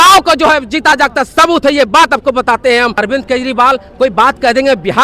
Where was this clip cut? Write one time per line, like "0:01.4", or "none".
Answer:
0:03.0